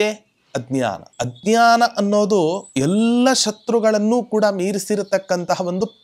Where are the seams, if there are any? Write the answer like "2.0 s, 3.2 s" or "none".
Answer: 1.1 s, 2.7 s